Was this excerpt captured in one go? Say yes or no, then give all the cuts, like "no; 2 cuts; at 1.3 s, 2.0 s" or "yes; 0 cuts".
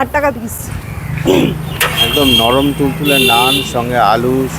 yes; 0 cuts